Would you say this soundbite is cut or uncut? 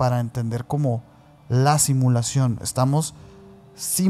uncut